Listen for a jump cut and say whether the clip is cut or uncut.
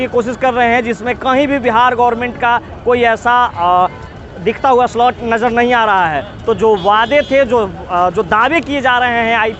uncut